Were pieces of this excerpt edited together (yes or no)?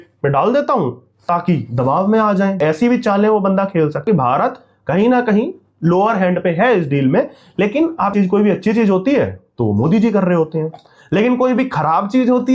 yes